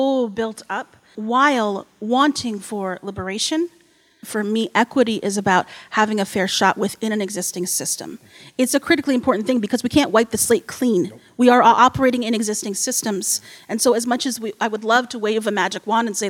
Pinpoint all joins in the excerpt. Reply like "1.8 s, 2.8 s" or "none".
1.1 s, 4.3 s